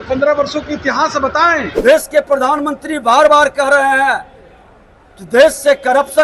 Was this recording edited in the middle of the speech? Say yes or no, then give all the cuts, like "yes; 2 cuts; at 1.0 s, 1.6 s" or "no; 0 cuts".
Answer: yes; 1 cut; at 1.7 s